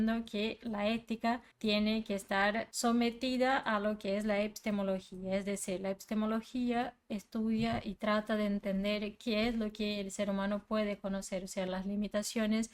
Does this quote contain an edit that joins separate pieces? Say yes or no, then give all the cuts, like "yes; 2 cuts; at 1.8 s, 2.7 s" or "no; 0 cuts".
yes; 2 cuts; at 1.5 s, 2.7 s